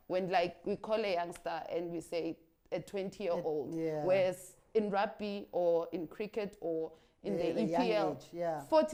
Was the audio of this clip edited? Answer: no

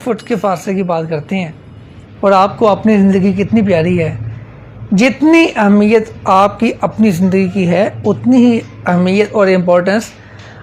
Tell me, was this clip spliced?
no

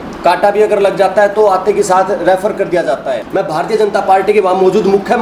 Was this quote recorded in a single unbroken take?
no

